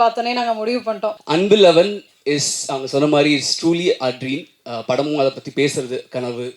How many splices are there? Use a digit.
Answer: 1